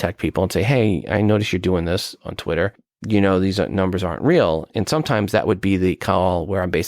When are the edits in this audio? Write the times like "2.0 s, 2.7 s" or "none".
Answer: 2.9 s, 4.7 s